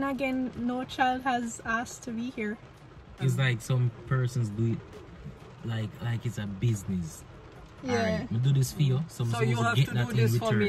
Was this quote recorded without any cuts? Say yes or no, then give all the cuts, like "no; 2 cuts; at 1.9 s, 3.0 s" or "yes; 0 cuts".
no; 1 cut; at 3.2 s